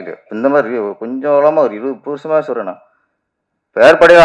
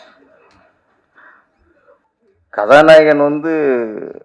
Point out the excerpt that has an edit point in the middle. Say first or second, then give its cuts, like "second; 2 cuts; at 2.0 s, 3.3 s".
second; 1 cut; at 2.0 s